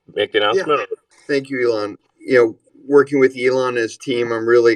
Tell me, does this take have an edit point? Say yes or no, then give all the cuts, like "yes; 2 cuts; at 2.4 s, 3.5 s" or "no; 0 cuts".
no; 0 cuts